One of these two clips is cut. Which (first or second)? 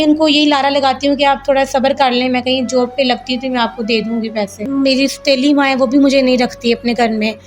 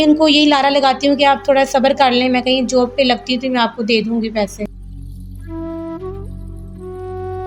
first